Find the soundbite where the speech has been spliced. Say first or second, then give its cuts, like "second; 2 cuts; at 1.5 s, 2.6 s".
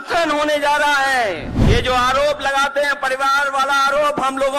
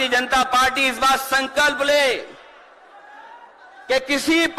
first; 1 cut; at 1.5 s